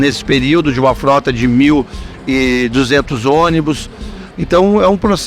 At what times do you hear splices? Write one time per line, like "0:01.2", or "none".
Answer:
0:04.2